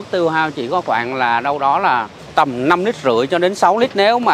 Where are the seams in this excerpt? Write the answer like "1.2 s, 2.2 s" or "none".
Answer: none